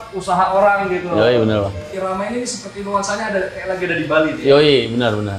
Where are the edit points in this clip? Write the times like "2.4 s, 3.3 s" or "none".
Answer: 1.9 s